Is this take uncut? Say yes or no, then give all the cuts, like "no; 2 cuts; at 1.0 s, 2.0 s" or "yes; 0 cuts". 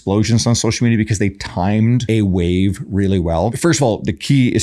no; 2 cuts; at 2.0 s, 3.5 s